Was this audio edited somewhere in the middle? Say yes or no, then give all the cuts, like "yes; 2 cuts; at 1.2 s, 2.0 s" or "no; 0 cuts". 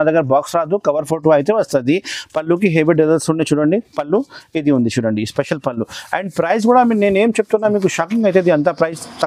no; 0 cuts